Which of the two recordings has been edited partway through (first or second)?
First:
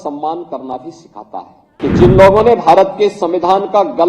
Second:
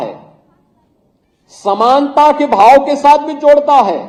first